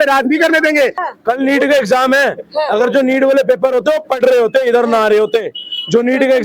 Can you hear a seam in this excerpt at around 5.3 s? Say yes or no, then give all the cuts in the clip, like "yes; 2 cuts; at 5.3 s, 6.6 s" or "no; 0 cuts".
no; 1 cut; at 1.0 s